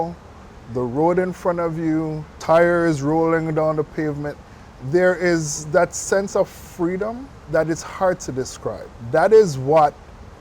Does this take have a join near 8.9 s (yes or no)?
yes